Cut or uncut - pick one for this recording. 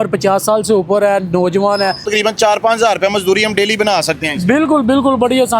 cut